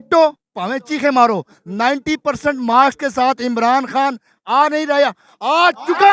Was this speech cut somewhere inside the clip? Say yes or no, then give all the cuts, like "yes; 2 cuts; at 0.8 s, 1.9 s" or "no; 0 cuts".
no; 0 cuts